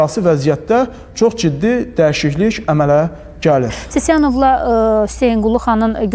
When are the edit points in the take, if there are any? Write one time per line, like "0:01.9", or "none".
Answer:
0:03.8